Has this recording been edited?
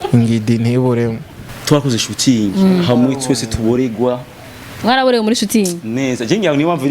yes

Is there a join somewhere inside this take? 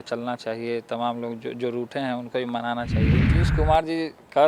yes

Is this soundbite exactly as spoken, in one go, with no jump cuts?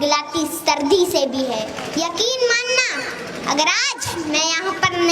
no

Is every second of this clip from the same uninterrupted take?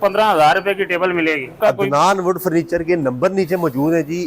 no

